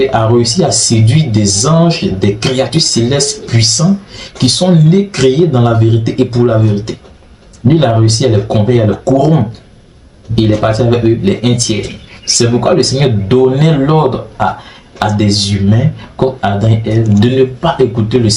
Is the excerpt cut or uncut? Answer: uncut